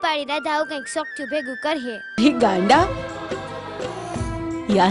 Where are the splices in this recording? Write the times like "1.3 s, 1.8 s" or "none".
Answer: 2.2 s